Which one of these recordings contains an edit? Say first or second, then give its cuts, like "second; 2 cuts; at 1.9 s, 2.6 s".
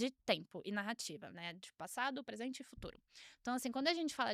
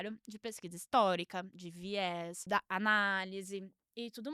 second; 1 cut; at 2.4 s